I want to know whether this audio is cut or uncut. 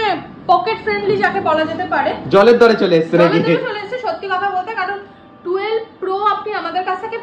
uncut